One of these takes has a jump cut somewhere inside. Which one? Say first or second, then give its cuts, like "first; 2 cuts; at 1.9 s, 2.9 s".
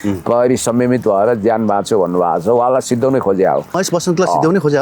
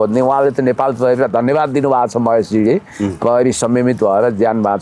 first; 1 cut; at 3.8 s